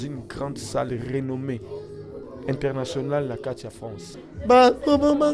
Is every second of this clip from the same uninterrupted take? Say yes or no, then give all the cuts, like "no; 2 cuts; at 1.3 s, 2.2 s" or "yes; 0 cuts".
no; 1 cut; at 4.2 s